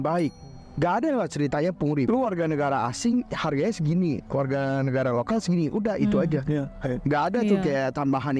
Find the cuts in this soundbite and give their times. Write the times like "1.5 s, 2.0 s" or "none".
2.1 s